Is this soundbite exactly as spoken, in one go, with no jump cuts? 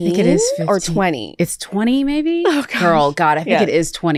yes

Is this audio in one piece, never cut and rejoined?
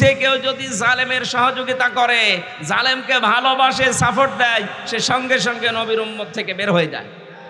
yes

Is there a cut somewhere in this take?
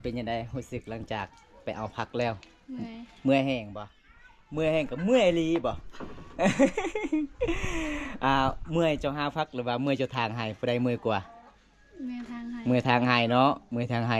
no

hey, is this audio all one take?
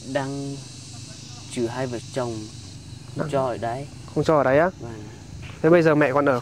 yes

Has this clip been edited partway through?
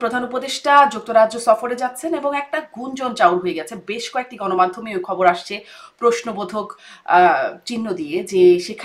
no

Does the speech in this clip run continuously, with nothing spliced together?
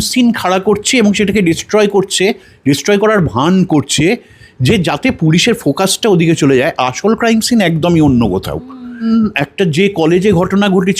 no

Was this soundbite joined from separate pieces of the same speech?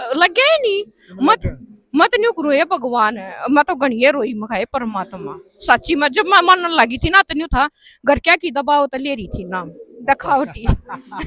no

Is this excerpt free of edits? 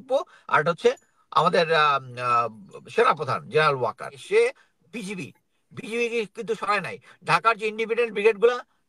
no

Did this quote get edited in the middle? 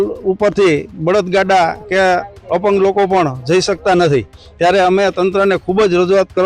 no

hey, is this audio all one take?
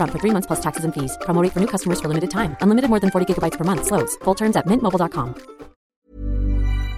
no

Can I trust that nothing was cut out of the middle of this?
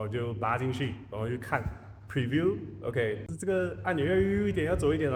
yes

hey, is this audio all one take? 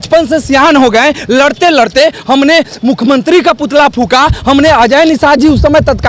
yes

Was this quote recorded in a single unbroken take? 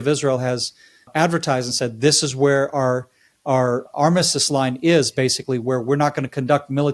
no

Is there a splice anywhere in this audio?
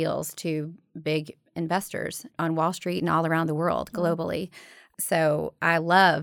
yes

